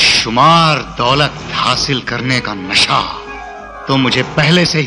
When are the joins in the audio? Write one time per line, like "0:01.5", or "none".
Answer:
none